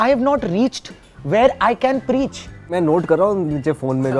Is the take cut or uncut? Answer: cut